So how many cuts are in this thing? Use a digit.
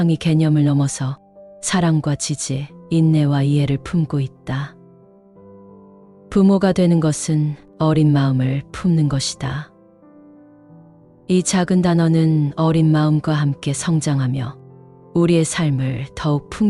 0